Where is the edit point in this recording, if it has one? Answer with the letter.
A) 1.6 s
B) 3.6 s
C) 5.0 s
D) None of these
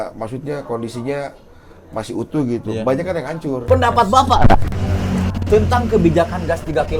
B